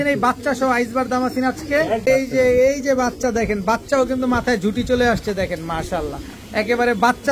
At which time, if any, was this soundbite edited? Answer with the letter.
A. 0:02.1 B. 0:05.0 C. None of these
A